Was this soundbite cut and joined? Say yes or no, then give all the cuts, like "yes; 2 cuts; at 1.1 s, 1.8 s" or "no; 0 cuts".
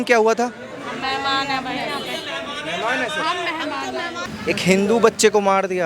yes; 1 cut; at 4.3 s